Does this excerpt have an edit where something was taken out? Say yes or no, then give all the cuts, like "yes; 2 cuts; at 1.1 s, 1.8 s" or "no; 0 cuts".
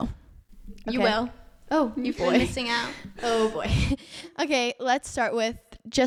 no; 0 cuts